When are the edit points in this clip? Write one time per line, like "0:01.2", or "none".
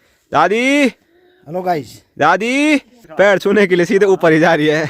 0:03.0

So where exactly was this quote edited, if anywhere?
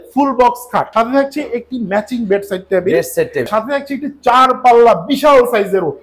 0:00.9
0:03.5

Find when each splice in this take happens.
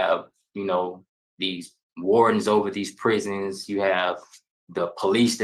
none

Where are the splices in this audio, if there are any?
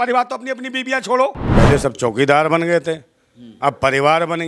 0:01.4

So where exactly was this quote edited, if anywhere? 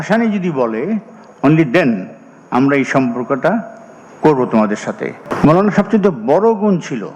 0:05.2

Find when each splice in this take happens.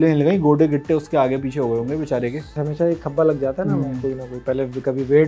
0:02.6

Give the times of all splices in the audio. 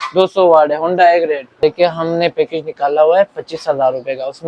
0:01.5

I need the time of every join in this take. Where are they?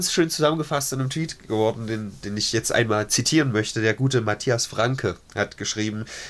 none

